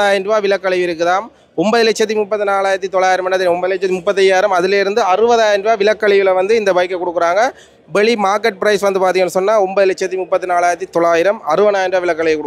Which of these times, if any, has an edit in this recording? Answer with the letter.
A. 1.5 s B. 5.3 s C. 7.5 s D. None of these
D